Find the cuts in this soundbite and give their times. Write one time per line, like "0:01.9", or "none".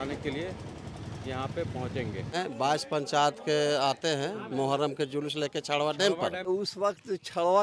0:02.3
0:06.5

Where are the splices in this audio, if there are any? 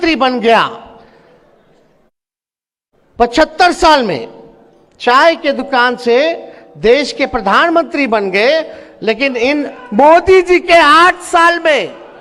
none

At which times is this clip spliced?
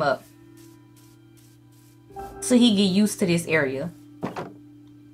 0:04.0

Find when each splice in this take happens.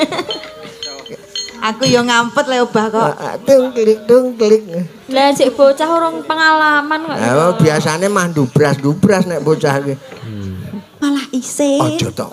0:11.0

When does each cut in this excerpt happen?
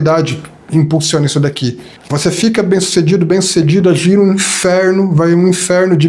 0:01.9

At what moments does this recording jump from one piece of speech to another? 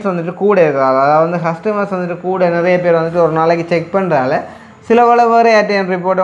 none

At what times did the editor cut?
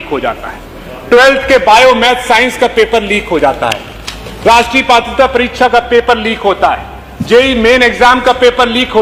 none

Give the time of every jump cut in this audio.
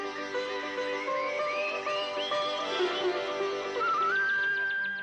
0:02.7

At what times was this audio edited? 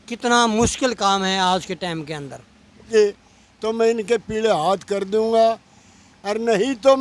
0:02.9

